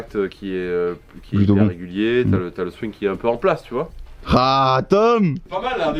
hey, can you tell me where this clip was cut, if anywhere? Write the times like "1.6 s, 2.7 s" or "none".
none